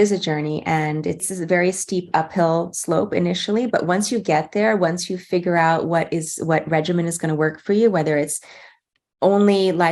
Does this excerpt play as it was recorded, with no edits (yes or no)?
no